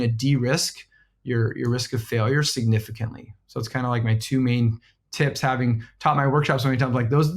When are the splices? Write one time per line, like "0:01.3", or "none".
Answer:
none